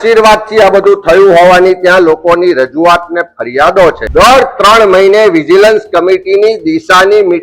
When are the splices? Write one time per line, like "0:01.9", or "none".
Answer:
0:04.0